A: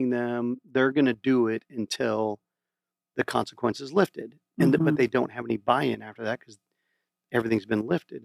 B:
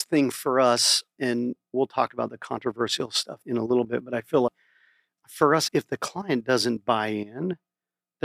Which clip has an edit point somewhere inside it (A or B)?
B